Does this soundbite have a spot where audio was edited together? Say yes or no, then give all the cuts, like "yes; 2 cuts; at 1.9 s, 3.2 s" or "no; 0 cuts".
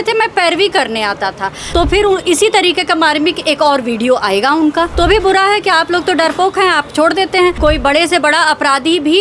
yes; 3 cuts; at 1.6 s, 4.9 s, 7.6 s